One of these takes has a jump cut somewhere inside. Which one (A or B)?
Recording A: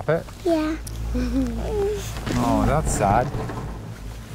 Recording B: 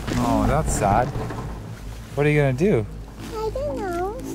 A